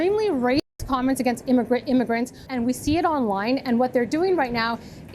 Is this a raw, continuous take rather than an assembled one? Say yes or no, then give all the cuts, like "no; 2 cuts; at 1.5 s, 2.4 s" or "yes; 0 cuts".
no; 1 cut; at 2.5 s